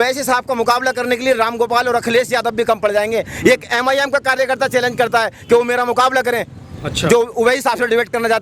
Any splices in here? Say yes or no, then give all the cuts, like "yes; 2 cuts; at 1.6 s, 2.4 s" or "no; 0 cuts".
no; 0 cuts